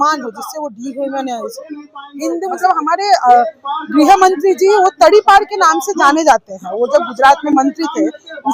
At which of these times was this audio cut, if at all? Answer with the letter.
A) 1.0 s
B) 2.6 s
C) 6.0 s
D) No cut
B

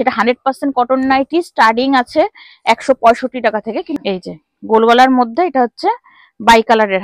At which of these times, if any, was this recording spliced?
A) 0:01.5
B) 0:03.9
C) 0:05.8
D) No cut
B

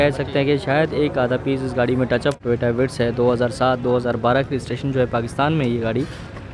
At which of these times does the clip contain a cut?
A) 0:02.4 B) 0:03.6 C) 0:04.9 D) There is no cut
A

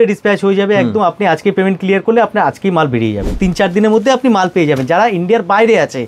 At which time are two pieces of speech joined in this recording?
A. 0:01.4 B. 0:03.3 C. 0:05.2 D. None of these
B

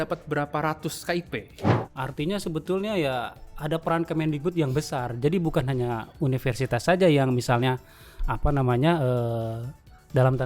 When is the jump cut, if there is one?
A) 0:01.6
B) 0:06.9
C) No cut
A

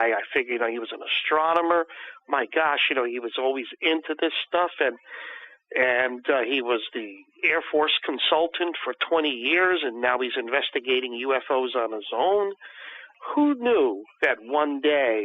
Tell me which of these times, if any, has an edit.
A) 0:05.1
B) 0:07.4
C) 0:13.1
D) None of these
C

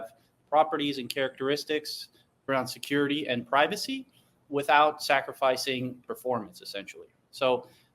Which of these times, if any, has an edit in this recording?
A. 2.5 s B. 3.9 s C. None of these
A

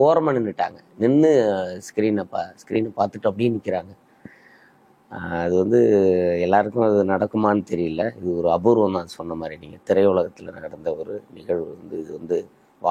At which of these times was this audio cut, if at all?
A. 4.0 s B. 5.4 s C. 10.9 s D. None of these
D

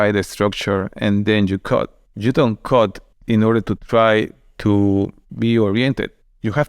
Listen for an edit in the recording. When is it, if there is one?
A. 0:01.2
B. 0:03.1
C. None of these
B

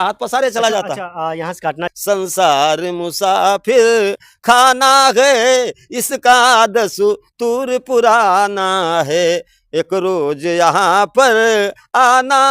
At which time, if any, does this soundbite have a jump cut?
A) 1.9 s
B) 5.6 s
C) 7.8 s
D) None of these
A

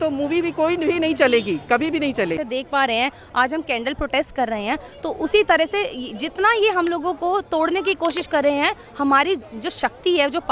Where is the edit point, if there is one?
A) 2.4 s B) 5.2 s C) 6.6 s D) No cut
A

